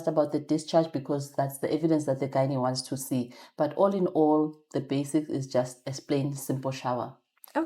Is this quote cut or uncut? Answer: uncut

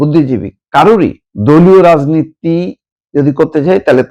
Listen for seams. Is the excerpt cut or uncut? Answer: cut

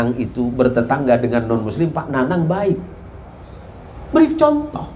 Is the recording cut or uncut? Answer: uncut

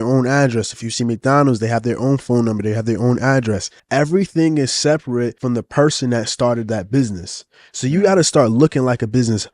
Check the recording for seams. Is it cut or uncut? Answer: cut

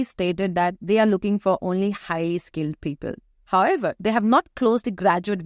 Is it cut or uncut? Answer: uncut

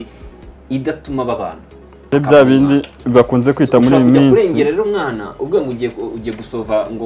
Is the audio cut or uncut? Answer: cut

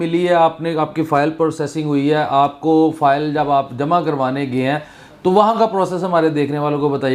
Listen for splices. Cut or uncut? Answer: uncut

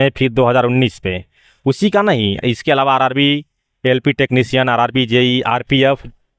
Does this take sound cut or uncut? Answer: uncut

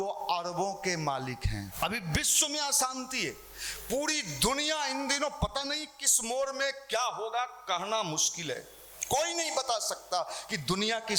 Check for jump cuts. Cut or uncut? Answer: cut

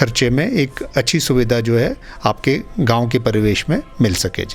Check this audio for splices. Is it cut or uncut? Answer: uncut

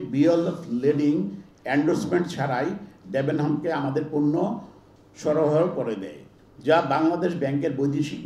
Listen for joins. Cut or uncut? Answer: uncut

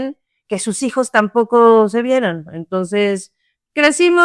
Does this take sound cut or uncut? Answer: uncut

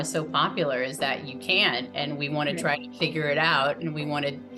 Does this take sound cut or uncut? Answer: uncut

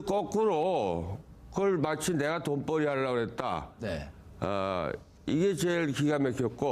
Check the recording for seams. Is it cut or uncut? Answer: cut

